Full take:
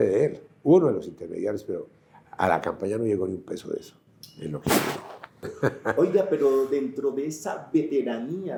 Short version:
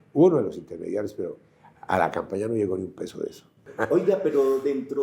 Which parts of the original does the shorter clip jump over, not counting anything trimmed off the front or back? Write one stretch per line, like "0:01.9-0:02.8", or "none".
0:04.2-0:05.8